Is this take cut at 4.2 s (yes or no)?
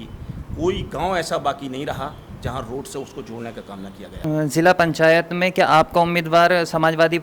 yes